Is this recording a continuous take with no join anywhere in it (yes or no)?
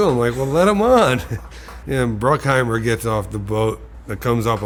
yes